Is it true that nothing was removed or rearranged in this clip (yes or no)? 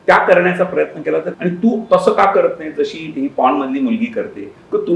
no